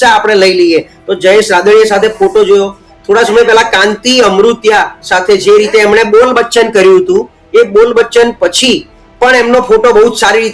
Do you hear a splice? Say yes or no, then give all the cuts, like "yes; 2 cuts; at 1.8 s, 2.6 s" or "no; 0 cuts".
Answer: no; 0 cuts